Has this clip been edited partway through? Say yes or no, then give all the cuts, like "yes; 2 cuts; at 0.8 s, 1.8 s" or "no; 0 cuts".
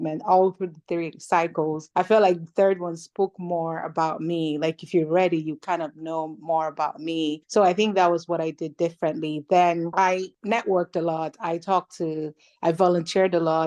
yes; 1 cut; at 1.8 s